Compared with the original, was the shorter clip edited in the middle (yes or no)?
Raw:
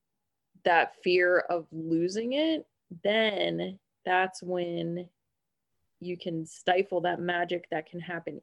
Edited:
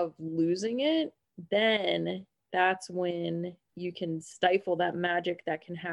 yes